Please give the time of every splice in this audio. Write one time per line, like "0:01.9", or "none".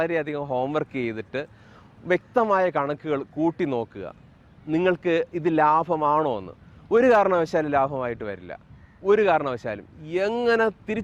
none